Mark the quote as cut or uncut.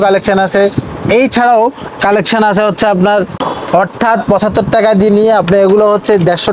cut